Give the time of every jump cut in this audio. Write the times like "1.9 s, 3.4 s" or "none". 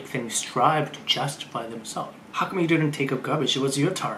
2.2 s